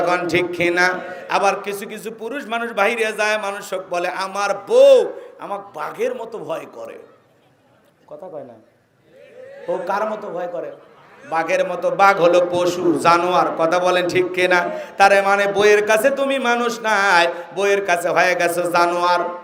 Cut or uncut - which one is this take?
uncut